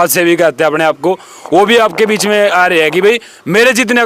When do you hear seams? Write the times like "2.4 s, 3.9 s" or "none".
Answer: none